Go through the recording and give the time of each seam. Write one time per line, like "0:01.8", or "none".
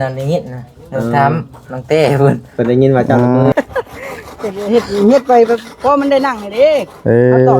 0:03.5